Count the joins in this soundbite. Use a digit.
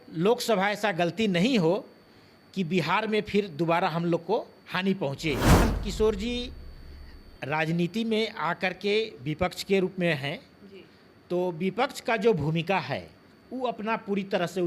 1